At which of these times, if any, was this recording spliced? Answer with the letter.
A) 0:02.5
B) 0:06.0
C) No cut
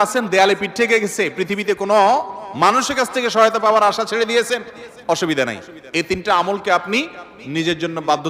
C